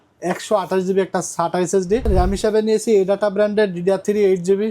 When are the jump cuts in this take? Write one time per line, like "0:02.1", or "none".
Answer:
0:02.1